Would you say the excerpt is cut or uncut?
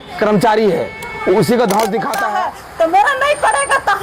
cut